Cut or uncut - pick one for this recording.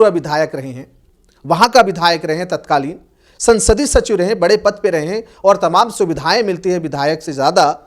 uncut